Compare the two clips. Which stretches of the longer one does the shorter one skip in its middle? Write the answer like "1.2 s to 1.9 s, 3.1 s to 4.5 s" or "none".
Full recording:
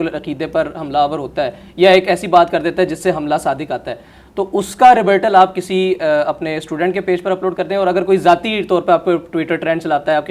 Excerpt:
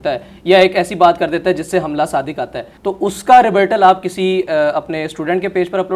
4.0 s to 4.2 s